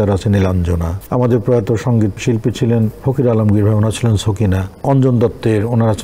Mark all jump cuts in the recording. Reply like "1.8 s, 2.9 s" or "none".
0.9 s, 2.2 s, 3.0 s, 4.7 s